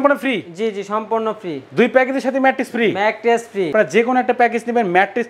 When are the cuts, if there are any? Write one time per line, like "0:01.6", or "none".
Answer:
none